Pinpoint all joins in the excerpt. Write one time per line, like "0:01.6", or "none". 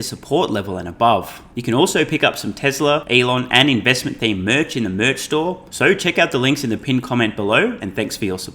0:01.5
0:03.0
0:05.7